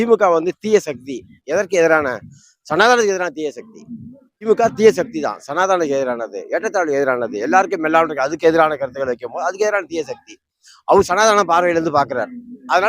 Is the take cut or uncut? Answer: cut